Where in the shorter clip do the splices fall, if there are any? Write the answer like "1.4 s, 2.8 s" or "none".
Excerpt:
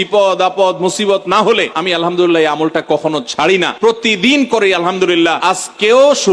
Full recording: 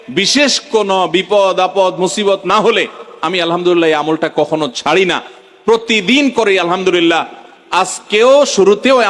1.7 s, 3.7 s, 5.4 s